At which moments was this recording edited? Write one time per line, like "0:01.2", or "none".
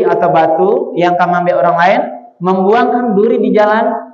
none